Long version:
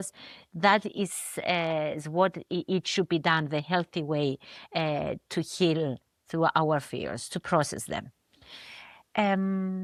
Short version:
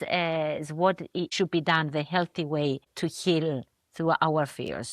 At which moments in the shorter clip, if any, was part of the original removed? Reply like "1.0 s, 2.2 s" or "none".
1.3 s, 2.9 s